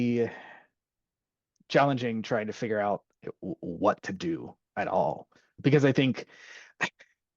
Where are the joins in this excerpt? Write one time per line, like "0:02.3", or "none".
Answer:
0:03.1
0:05.6